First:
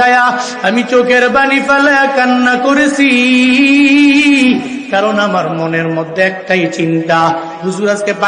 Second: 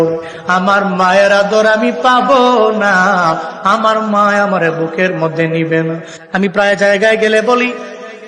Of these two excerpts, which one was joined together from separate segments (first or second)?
second